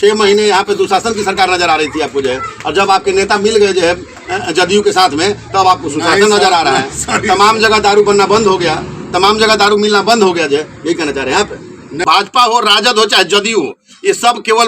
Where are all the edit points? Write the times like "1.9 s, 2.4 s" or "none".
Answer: 12.0 s